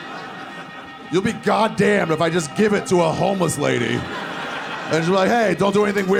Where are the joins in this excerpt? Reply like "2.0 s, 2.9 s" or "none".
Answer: none